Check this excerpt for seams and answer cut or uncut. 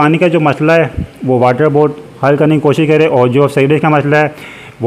uncut